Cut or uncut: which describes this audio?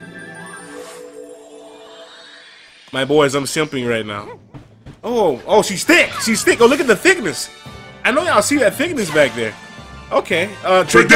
uncut